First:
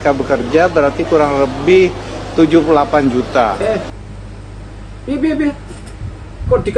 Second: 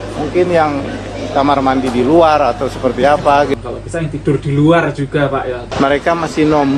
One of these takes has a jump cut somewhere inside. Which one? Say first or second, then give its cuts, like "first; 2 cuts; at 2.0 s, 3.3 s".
second; 1 cut; at 5.6 s